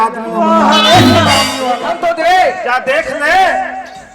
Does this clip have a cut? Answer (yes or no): yes